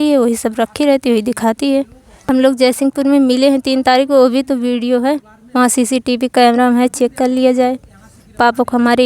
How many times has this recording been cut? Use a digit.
1